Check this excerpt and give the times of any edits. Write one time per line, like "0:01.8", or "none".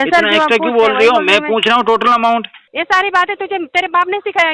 0:02.6